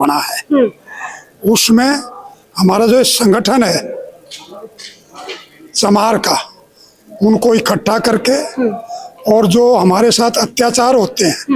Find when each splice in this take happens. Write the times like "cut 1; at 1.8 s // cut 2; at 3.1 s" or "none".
none

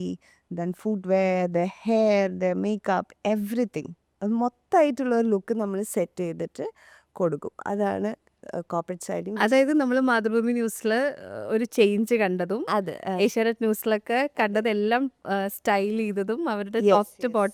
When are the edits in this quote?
none

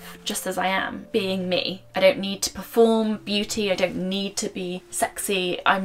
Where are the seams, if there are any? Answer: cut 1; at 1.0 s // cut 2; at 1.8 s // cut 3; at 4.8 s

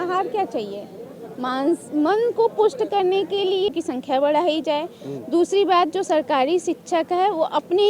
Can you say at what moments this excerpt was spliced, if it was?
cut 1; at 3.7 s

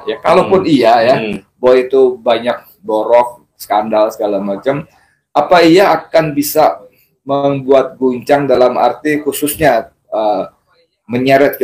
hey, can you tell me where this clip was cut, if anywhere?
none

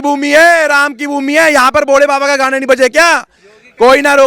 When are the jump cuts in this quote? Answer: none

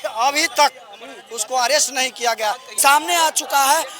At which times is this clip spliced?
cut 1; at 2.7 s

